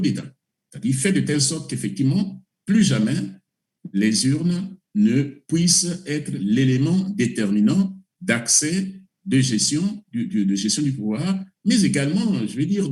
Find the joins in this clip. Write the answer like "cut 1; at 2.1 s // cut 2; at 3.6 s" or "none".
none